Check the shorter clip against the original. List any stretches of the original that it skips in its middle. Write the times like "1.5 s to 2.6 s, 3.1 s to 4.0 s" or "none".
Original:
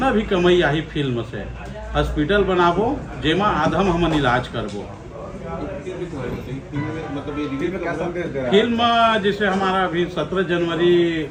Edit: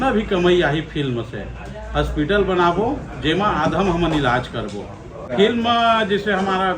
5.3 s to 8.4 s